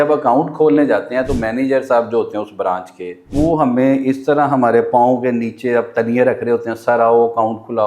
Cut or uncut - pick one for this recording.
cut